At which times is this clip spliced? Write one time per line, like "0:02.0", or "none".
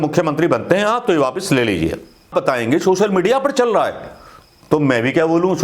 0:02.3